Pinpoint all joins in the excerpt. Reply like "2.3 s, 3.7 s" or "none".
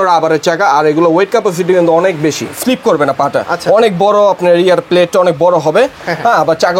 2.5 s